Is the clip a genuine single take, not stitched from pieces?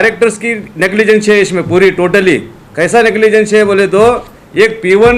yes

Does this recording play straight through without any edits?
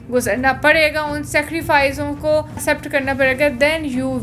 no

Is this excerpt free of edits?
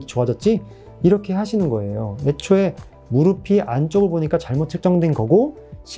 yes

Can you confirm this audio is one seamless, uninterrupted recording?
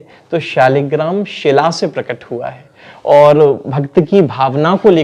yes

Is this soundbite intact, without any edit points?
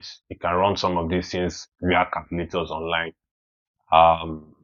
yes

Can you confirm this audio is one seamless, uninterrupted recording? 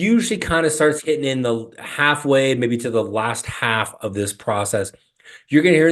yes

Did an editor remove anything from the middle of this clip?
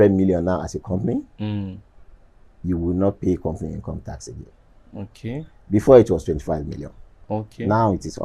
no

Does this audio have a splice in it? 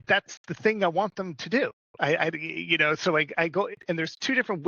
yes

